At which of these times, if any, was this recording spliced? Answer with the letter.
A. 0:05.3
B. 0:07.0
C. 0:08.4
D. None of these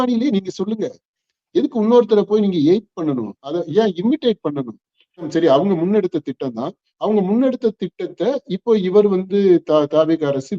A